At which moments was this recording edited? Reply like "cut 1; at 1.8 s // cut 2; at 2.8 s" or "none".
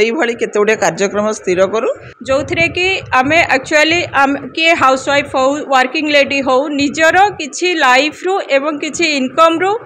cut 1; at 2.1 s